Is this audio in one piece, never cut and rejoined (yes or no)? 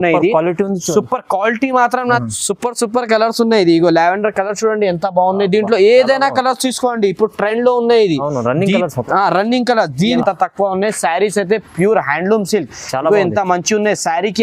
no